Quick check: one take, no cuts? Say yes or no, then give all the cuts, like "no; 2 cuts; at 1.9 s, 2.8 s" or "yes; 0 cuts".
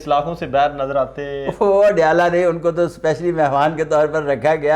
yes; 0 cuts